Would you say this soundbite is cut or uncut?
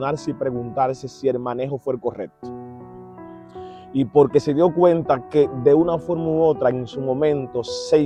uncut